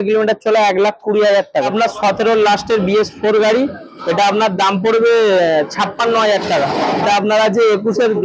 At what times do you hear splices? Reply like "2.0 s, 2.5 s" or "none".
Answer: 1.7 s, 7.0 s